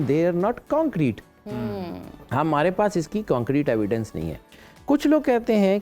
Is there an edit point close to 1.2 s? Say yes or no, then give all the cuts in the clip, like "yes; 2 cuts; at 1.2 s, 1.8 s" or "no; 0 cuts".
no; 0 cuts